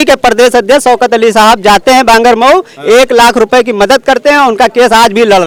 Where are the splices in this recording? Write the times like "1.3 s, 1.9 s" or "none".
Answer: none